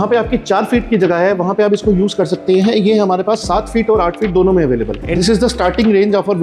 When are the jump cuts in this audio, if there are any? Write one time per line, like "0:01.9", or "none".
0:05.0